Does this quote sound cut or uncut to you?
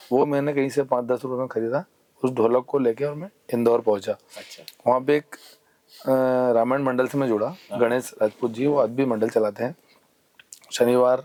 uncut